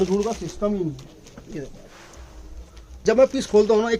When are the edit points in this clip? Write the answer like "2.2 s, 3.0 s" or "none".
2.9 s